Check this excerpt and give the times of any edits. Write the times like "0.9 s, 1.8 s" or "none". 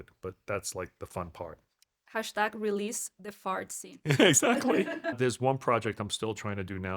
4.5 s